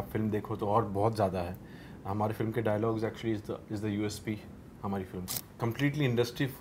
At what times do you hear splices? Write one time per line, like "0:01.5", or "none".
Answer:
0:05.5